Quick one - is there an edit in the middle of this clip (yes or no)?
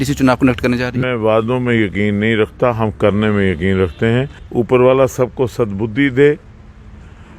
yes